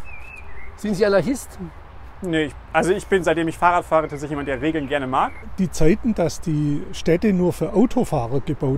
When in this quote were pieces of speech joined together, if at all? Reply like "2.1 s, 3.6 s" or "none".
5.4 s